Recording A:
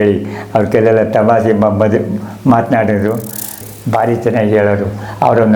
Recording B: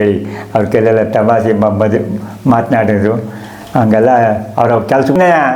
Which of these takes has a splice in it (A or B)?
A